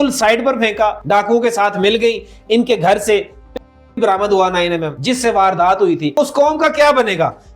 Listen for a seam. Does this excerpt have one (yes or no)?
yes